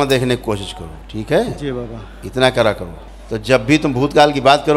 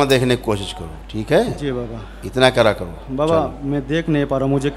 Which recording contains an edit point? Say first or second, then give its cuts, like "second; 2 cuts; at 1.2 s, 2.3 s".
first; 1 cut; at 3.0 s